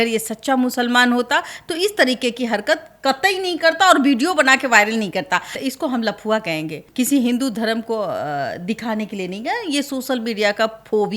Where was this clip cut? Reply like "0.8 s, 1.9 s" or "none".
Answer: 5.6 s, 6.8 s